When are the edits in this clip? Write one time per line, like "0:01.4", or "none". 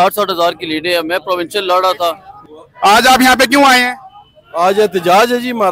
0:02.3